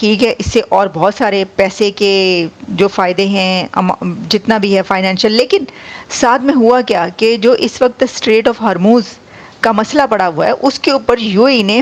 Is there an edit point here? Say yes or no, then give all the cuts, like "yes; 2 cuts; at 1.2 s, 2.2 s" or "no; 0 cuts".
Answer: no; 0 cuts